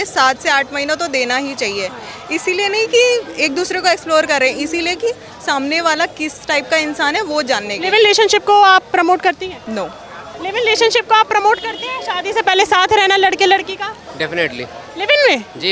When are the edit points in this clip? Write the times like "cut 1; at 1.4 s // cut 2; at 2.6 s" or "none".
none